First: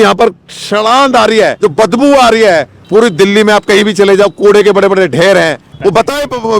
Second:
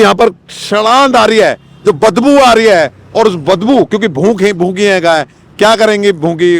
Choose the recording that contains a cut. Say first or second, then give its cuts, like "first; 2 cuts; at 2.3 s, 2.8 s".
first; 3 cuts; at 1.5 s, 2.7 s, 5.7 s